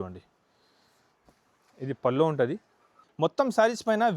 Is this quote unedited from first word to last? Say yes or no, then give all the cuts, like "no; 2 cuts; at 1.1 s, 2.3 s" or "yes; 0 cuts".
no; 1 cut; at 3.0 s